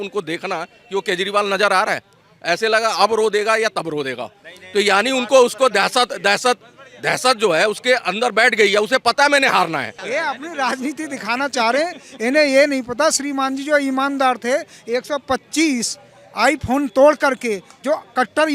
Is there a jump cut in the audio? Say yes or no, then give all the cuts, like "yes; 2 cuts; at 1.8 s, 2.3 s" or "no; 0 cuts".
yes; 1 cut; at 10.0 s